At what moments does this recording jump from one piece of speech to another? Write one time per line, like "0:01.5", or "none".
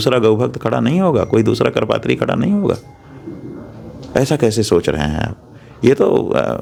none